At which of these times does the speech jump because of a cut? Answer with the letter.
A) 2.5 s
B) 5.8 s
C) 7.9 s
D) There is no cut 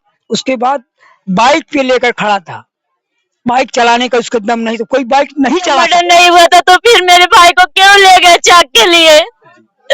B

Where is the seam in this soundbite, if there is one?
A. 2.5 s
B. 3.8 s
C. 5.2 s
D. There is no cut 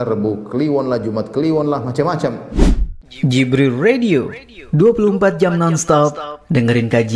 A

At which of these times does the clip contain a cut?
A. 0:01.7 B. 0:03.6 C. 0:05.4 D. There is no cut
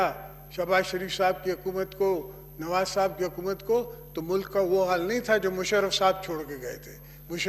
D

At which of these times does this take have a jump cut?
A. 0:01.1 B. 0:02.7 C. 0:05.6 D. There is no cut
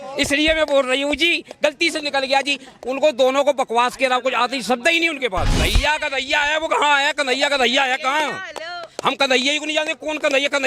C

